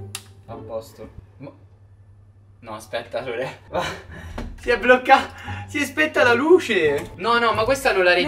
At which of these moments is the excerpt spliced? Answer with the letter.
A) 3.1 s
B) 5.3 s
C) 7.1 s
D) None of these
C